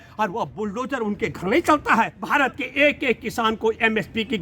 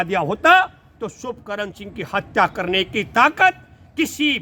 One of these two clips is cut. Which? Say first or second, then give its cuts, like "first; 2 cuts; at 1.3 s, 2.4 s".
first; 1 cut; at 2.2 s